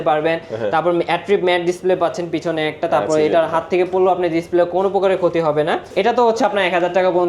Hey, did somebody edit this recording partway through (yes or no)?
yes